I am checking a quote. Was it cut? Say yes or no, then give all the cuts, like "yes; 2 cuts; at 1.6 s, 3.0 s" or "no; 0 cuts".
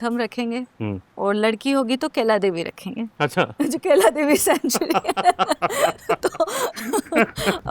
no; 0 cuts